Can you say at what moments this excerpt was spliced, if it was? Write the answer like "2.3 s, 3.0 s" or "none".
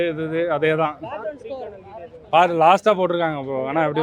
none